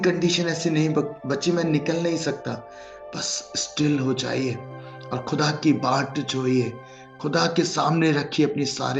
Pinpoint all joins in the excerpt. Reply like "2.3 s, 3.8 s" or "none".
none